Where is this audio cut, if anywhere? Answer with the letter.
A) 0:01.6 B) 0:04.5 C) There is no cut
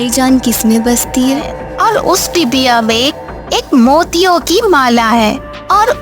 A